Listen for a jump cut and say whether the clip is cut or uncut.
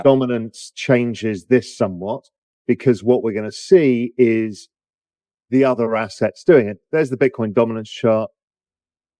cut